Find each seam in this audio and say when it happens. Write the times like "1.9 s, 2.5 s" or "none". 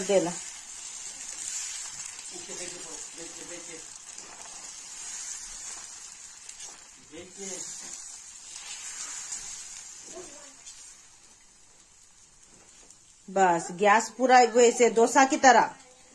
none